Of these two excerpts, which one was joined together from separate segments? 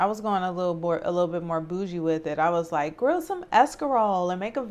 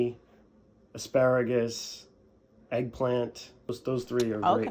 second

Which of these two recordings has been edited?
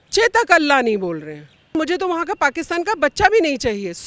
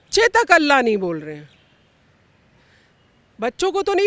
first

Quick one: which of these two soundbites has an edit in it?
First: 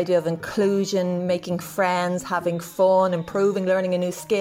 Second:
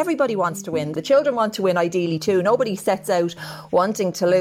second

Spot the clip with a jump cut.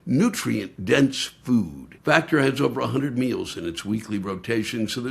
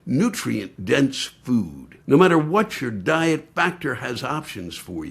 first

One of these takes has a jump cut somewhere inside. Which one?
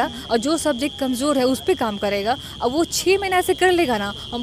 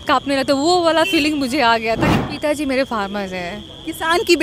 second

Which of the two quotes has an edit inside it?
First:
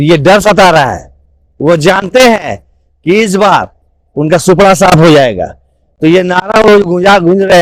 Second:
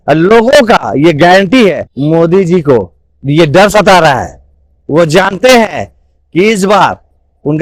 second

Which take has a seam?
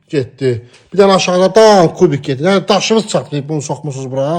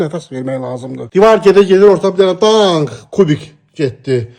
second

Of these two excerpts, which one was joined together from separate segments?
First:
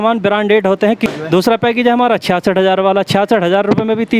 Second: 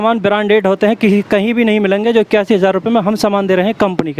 first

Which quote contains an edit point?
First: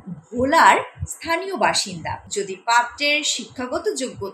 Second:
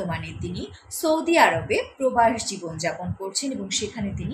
first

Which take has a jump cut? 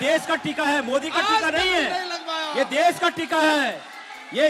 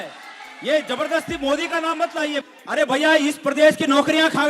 second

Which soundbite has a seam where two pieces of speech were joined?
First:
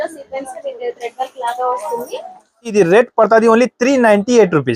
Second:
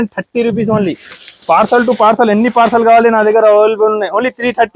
first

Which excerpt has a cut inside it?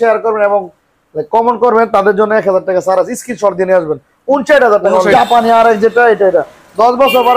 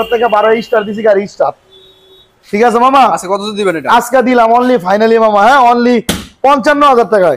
first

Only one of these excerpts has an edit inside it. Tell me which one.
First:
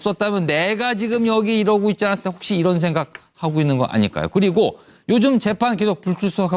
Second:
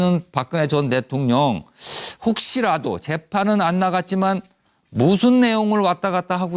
first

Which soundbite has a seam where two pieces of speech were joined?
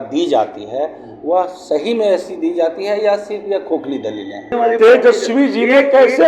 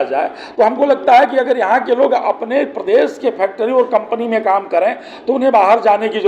first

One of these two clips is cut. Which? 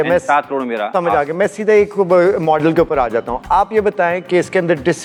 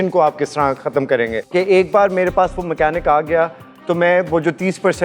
second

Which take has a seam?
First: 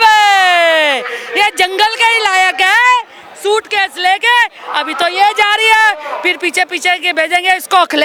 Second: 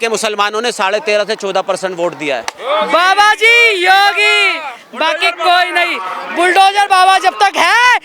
second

